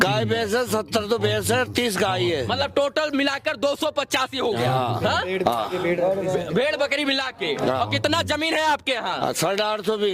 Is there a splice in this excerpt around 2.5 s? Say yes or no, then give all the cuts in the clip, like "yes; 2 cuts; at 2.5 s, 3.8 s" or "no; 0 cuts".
no; 0 cuts